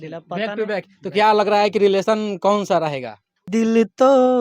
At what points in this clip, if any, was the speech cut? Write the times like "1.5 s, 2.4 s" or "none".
3.5 s